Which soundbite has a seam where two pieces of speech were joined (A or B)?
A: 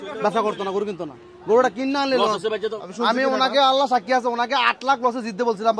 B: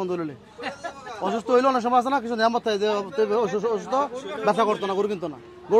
A